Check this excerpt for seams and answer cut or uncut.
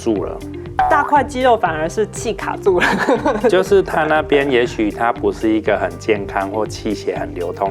uncut